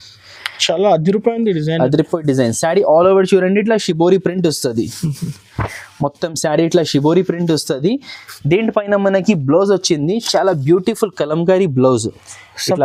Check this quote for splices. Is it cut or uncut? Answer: uncut